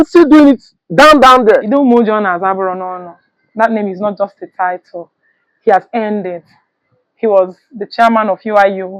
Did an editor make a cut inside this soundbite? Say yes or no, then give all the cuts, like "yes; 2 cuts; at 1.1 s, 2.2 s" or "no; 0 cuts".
yes; 1 cut; at 1.7 s